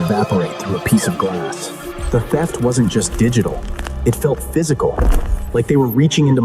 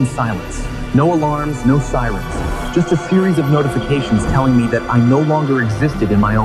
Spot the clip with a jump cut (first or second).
first